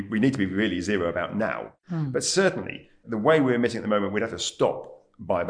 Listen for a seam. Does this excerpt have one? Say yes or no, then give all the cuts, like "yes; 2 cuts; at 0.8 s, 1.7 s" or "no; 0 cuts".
yes; 1 cut; at 1.7 s